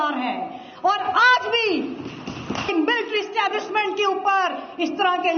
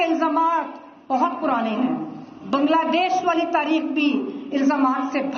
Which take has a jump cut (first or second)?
first